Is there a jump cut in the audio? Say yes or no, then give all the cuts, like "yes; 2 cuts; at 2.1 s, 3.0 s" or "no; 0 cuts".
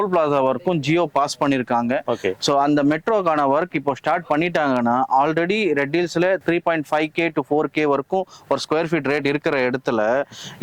no; 0 cuts